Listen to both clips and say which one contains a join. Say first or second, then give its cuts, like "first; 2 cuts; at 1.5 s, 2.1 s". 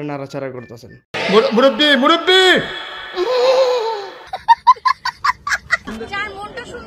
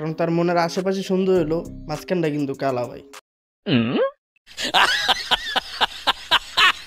first; 1 cut; at 5.8 s